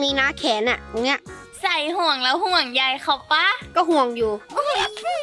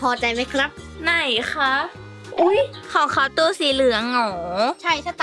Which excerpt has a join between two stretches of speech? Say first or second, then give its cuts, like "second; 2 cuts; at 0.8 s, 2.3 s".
second; 1 cut; at 2.8 s